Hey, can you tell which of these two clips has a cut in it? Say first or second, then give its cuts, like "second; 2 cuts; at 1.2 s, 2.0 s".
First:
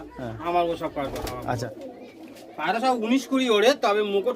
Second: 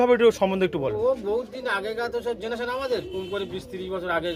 first; 1 cut; at 1.6 s